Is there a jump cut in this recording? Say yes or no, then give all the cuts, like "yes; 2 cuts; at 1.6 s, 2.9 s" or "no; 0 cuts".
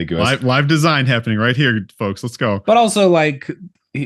no; 0 cuts